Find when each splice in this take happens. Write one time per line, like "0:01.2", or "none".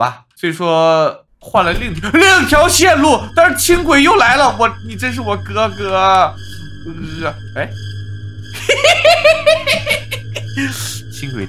none

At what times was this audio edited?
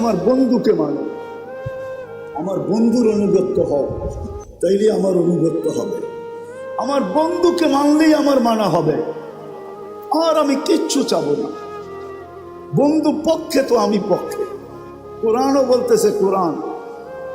0:01.1
0:02.3

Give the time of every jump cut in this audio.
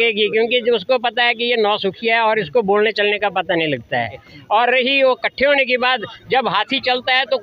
0:04.3

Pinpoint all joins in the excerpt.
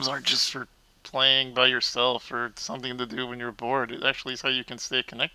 none

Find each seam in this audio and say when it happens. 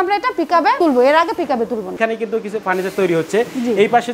0:02.0

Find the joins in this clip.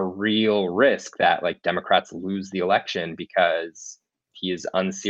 none

